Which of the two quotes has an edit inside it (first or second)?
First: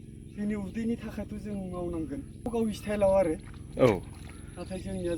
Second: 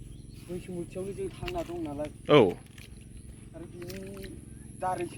first